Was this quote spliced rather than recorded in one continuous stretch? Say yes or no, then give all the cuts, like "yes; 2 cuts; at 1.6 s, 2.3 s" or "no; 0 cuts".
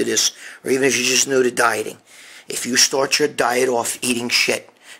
no; 0 cuts